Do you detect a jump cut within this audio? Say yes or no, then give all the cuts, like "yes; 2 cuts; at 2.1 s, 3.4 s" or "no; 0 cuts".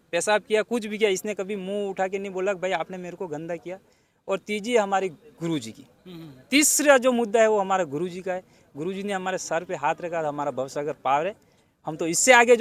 no; 0 cuts